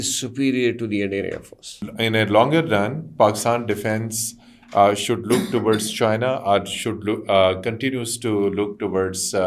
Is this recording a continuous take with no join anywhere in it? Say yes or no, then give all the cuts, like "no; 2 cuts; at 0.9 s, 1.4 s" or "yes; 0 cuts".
no; 1 cut; at 1.8 s